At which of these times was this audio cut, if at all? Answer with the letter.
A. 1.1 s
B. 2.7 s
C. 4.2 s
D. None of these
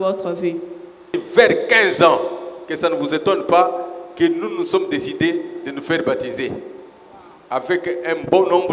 A